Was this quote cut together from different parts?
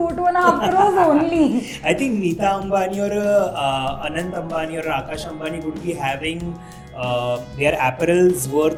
no; 0 cuts

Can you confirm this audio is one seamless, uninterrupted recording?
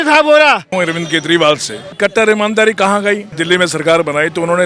no; 3 cuts; at 0.7 s, 2.0 s, 3.3 s

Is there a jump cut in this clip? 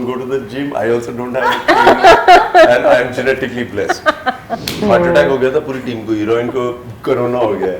yes; 1 cut; at 4.8 s

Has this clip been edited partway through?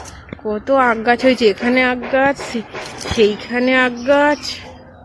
no; 0 cuts

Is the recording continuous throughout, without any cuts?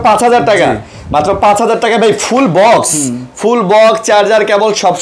yes; 0 cuts

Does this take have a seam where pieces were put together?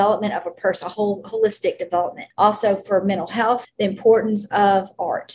yes; 2 cuts; at 2.2 s, 3.7 s

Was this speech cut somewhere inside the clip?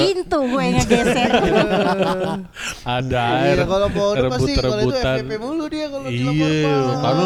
no; 0 cuts

